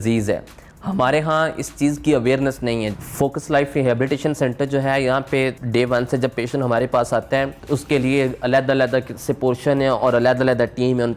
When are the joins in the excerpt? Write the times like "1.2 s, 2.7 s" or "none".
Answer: 2.9 s, 5.6 s, 7.6 s